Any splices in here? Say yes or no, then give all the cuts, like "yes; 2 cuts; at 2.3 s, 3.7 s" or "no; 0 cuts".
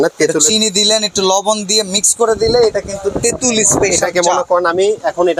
no; 0 cuts